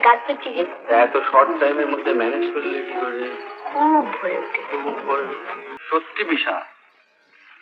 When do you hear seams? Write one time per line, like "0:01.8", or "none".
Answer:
0:05.7